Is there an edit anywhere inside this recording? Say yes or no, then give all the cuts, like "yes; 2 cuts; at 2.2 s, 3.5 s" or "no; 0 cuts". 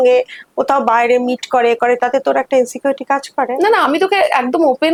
no; 0 cuts